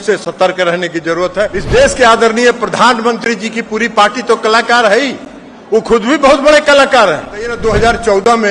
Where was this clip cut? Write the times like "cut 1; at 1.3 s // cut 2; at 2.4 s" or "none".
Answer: cut 1; at 1.6 s // cut 2; at 7.6 s